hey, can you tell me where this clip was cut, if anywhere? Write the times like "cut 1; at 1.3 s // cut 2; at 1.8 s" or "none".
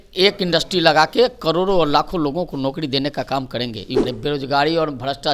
cut 1; at 4.0 s